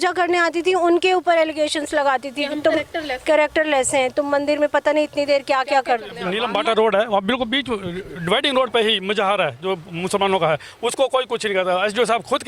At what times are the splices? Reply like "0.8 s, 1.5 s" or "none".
6.2 s